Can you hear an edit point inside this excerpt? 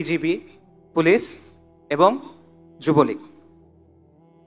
no; 0 cuts

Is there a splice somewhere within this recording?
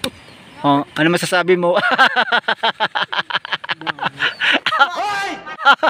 yes; 1 cut; at 4.9 s

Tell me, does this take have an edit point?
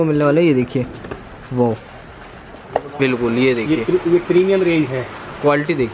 yes; 1 cut; at 3.0 s

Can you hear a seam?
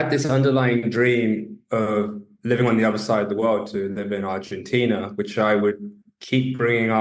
no; 0 cuts

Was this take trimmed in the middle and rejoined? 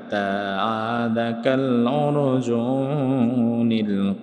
no; 0 cuts

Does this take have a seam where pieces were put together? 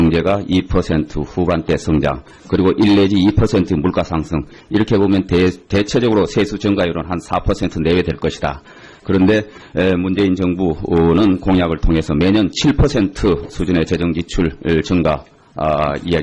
yes; 1 cut; at 9.6 s

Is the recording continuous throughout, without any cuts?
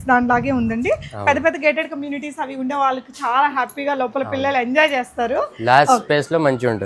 yes; 0 cuts

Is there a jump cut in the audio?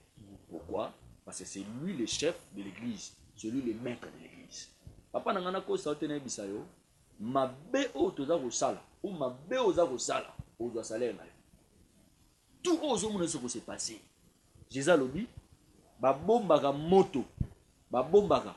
no; 0 cuts

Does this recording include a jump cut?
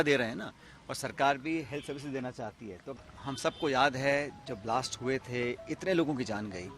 yes; 1 cut; at 2.9 s

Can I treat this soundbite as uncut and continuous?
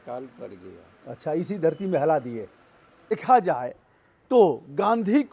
no; 1 cut; at 3.1 s

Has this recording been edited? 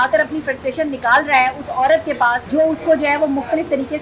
yes; 1 cut; at 2.4 s

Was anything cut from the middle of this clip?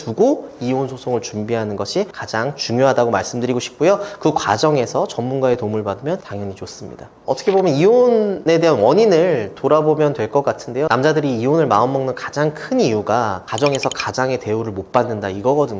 no; 0 cuts

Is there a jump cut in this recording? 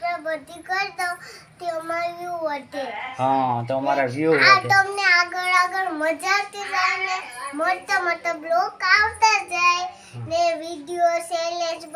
no; 0 cuts

